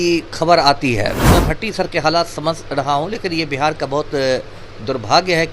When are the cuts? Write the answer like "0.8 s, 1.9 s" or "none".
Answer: 1.3 s